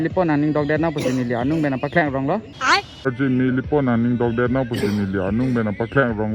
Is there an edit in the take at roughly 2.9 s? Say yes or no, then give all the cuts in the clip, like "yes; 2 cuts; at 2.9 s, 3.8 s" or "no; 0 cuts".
yes; 1 cut; at 2.9 s